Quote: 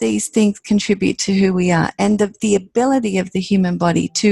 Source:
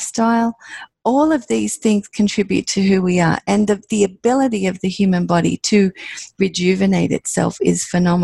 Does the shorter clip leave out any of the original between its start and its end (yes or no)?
no